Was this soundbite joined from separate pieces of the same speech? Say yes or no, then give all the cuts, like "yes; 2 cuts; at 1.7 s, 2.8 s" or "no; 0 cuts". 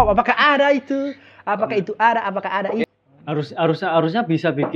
yes; 1 cut; at 2.9 s